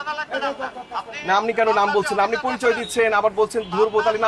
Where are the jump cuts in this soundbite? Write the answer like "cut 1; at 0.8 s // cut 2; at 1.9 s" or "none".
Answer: none